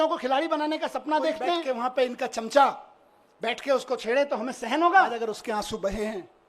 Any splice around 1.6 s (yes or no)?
yes